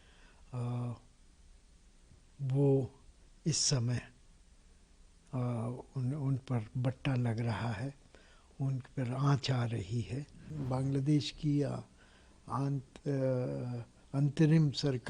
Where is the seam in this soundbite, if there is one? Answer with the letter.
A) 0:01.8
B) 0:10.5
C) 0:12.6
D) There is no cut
B